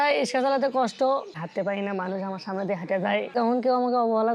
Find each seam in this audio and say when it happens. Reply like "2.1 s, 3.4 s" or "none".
1.3 s, 3.3 s